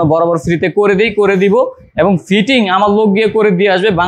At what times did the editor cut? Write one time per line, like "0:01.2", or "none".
none